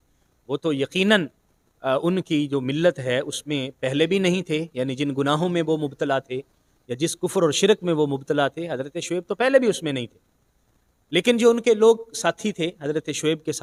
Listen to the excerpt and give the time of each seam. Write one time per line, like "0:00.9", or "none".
none